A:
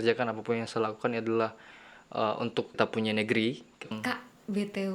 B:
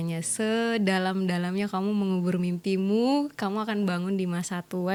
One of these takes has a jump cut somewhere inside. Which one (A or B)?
A